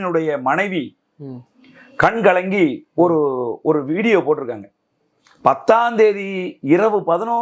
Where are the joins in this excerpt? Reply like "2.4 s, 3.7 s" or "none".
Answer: none